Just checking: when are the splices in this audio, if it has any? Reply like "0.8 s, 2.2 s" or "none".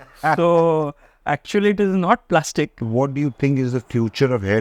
2.8 s